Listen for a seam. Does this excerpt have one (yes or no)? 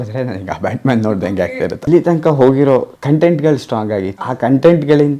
yes